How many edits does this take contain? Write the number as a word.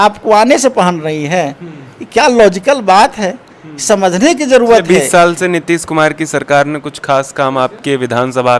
one